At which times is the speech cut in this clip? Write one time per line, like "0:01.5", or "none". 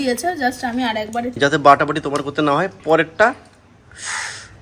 0:01.4